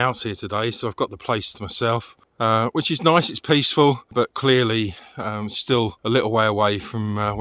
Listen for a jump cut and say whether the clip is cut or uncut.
uncut